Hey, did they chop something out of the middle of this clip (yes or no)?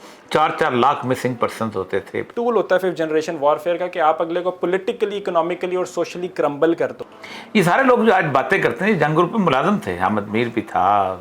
yes